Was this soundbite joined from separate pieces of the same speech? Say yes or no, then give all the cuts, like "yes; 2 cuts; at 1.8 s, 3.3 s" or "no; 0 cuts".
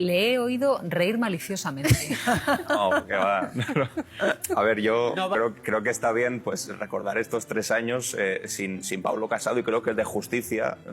yes; 1 cut; at 5.3 s